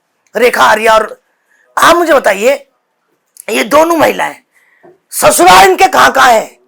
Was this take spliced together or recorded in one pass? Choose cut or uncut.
uncut